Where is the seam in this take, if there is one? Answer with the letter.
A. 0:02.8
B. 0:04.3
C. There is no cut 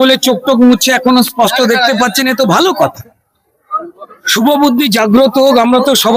C